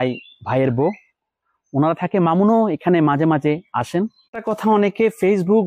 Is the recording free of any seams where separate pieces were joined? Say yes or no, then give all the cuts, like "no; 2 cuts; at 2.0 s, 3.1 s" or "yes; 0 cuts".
no; 1 cut; at 4.3 s